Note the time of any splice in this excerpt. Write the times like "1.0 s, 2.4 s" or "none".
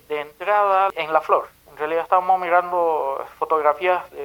0.9 s